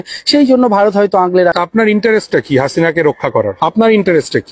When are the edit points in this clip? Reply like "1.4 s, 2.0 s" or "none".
1.6 s, 3.5 s